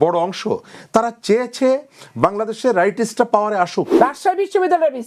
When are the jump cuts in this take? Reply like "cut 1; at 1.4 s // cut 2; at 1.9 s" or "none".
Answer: cut 1; at 3.9 s